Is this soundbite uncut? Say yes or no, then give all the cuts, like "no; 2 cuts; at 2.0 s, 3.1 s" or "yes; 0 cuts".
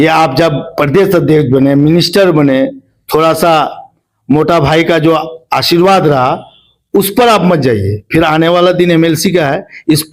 yes; 0 cuts